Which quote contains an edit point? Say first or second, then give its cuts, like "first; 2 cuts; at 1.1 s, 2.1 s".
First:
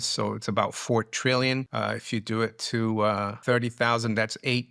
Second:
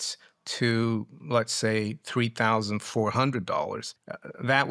first; 2 cuts; at 1.7 s, 3.3 s